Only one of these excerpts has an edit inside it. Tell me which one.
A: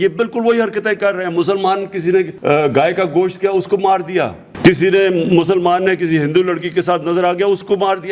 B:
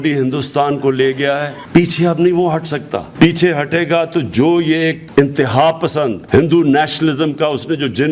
A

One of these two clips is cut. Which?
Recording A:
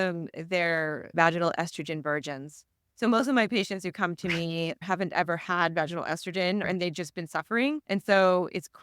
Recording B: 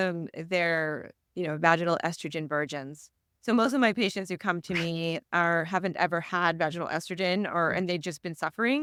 A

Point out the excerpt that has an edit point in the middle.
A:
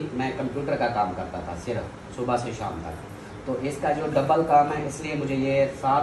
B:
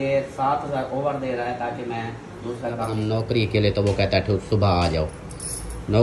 B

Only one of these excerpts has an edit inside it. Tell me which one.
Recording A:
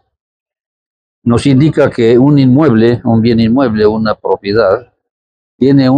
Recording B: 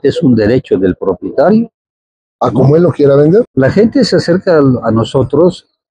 B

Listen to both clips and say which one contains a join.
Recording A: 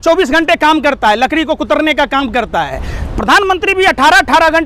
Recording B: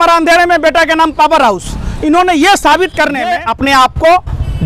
B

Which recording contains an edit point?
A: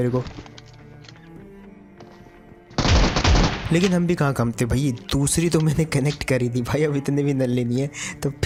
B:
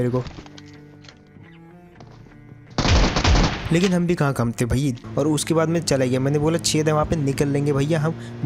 B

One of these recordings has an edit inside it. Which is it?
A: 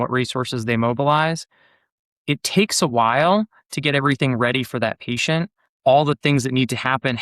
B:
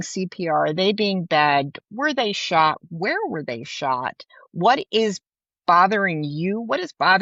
A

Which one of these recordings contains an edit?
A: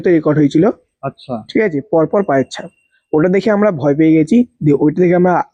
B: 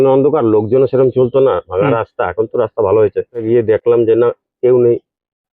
B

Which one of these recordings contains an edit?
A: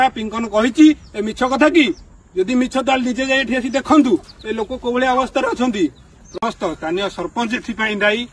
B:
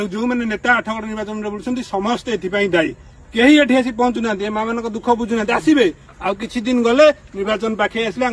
A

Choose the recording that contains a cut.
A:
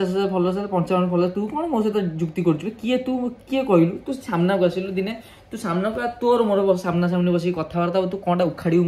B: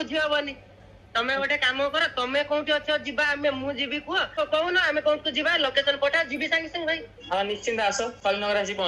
B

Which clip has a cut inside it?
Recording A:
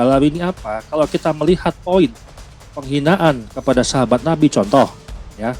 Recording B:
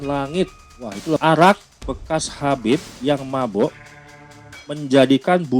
B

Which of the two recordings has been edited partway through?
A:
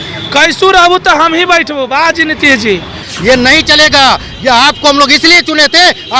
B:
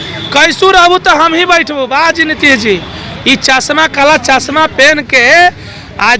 A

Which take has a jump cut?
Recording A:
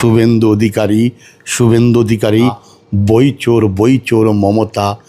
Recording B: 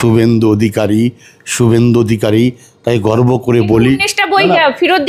A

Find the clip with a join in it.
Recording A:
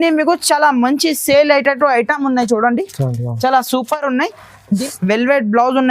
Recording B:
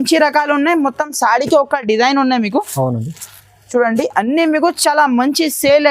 A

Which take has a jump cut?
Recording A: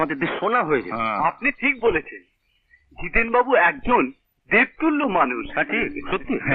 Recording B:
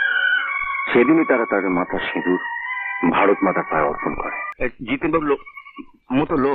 B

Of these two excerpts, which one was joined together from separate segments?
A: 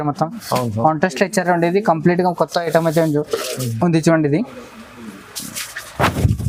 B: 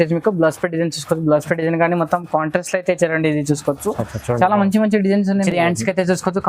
B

